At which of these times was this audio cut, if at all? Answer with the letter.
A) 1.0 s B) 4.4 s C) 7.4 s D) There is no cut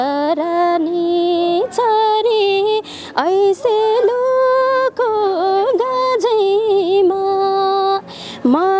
D